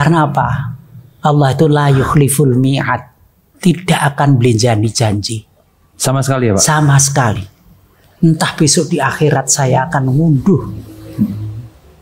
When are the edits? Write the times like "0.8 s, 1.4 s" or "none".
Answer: none